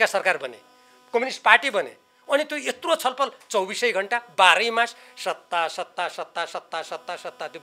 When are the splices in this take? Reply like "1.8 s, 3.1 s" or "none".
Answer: none